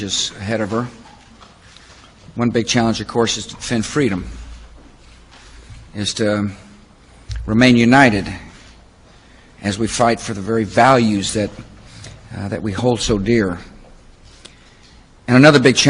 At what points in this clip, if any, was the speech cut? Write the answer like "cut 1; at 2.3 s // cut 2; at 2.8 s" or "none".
cut 1; at 5.8 s